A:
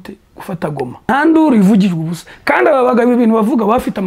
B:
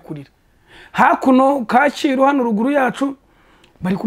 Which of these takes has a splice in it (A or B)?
A